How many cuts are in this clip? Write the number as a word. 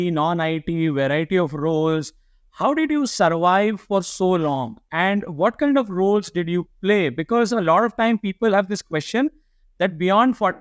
zero